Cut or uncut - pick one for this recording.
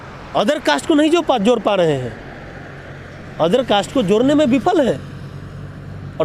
uncut